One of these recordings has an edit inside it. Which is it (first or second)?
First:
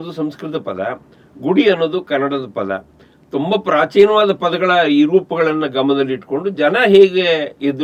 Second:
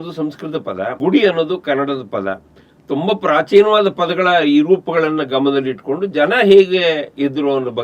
second